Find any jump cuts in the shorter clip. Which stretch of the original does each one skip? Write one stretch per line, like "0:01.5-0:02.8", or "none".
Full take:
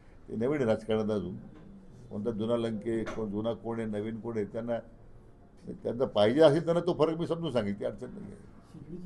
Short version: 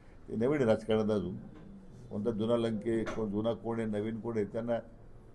none